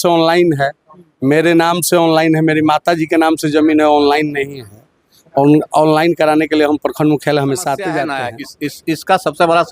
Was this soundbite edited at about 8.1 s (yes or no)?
yes